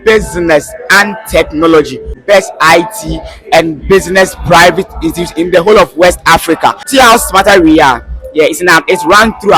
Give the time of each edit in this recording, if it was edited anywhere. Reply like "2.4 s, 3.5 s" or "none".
2.2 s, 6.8 s